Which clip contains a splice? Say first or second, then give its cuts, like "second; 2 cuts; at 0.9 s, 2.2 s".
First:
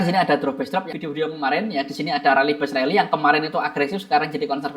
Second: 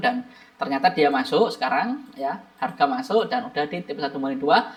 first; 1 cut; at 0.9 s